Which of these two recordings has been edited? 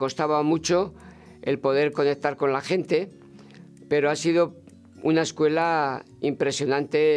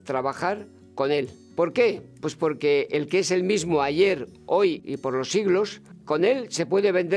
second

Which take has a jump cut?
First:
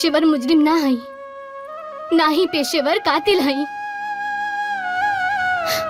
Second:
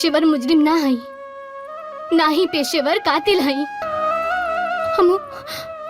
second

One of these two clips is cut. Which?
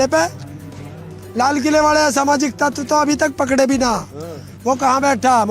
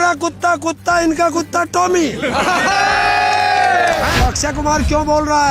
second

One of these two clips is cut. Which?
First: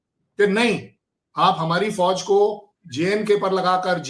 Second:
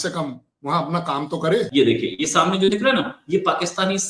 second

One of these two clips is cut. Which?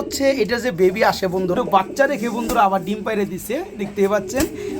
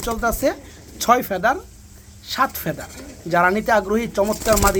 first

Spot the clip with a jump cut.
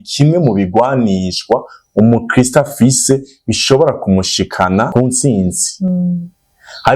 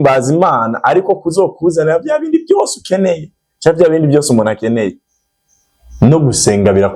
first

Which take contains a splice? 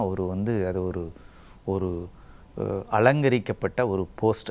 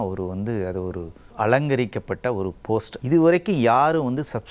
second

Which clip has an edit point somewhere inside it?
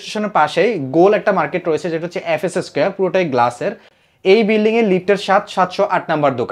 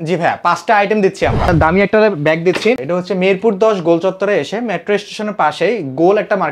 second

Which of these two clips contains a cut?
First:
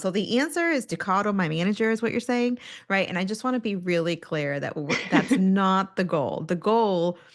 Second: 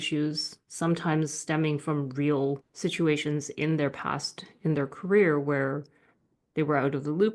second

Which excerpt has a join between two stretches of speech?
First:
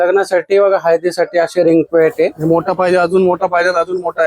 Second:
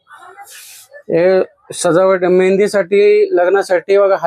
first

